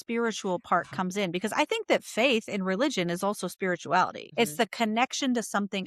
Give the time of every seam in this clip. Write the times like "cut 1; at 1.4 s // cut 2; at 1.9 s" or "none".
cut 1; at 4.2 s